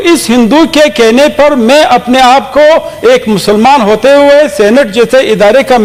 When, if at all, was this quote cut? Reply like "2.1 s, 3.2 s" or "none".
none